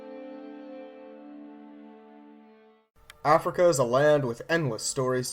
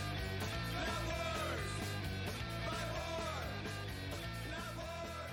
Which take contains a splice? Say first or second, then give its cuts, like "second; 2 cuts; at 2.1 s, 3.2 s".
first; 1 cut; at 2.8 s